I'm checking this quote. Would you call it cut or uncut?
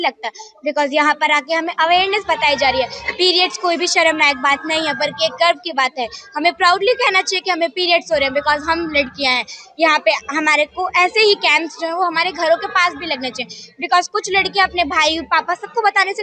uncut